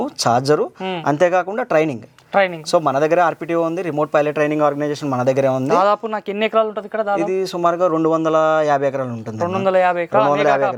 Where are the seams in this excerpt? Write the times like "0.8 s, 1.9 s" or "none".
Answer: none